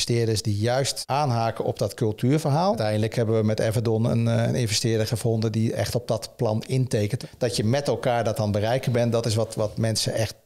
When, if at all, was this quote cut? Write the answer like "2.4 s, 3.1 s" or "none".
1.0 s, 2.8 s, 7.2 s